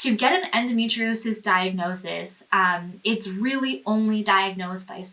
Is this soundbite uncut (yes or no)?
yes